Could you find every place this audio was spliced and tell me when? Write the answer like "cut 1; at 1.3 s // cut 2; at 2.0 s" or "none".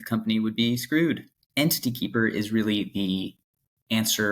cut 1; at 1.3 s